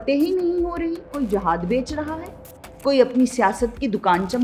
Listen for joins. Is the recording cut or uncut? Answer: cut